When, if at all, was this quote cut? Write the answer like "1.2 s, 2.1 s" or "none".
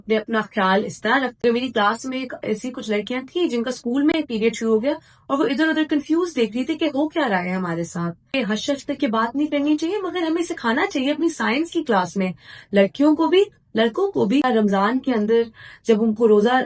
1.4 s, 8.2 s, 14.4 s